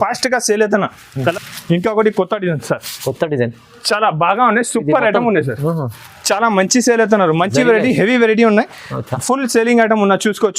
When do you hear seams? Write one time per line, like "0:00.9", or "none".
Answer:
0:01.3